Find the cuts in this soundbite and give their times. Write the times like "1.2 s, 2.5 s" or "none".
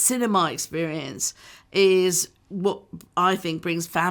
none